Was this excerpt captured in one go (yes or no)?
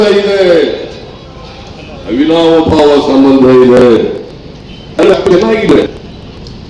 yes